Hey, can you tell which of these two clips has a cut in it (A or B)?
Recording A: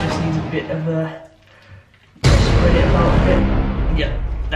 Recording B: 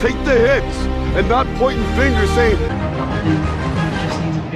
B